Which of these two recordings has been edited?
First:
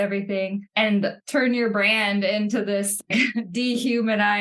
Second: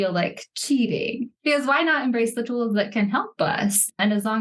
first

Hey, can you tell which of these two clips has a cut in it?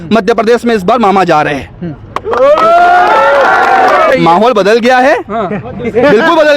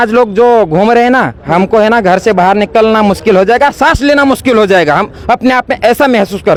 first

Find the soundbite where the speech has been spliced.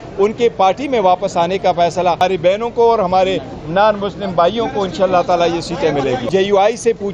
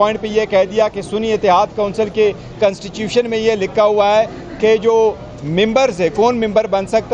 first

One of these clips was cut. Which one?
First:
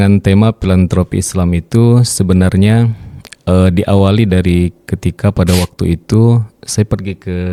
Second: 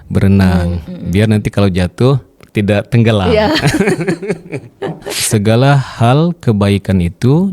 second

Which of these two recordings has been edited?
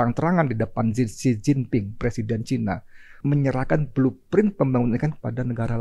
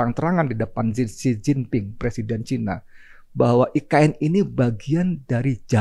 first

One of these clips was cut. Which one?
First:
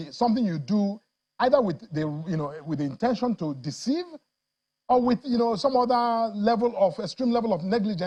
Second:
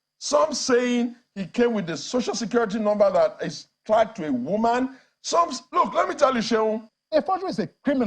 second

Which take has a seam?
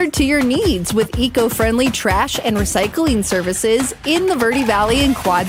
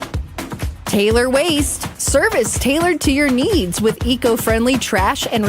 second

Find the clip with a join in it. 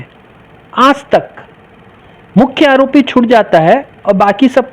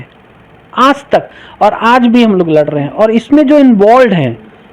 second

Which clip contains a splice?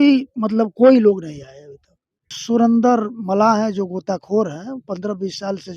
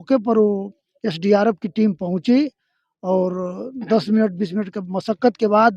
first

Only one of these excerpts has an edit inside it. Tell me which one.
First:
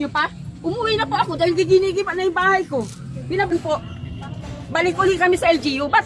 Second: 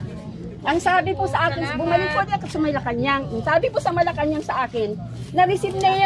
first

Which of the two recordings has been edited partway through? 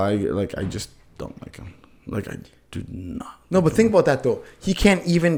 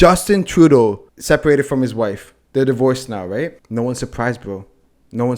second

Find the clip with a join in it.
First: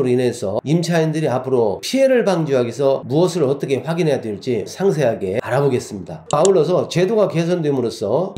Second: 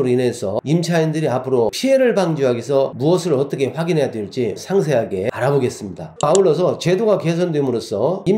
second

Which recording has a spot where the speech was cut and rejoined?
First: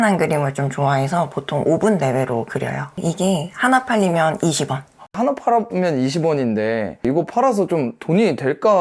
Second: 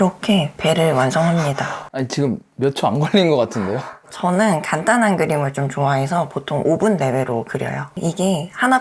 first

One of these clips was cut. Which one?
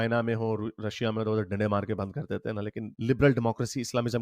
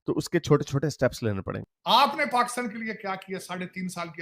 second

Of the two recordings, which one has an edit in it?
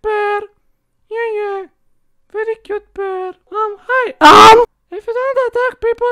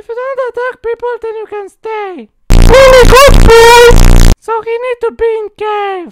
first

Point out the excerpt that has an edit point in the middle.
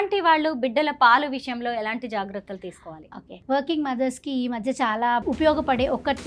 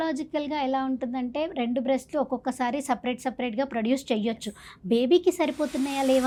first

